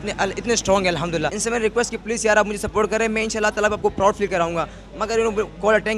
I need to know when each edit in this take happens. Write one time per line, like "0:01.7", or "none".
0:01.4